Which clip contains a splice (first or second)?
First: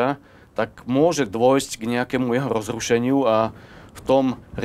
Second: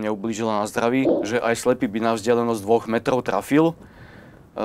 second